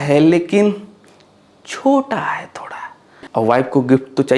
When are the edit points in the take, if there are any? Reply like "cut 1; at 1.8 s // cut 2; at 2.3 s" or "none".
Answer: cut 1; at 3.2 s